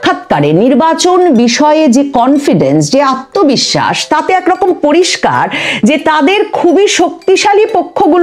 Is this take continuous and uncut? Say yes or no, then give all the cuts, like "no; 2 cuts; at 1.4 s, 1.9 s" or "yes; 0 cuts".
yes; 0 cuts